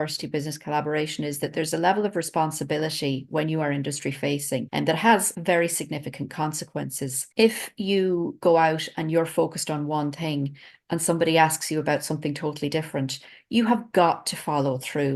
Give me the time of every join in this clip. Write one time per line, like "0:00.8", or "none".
none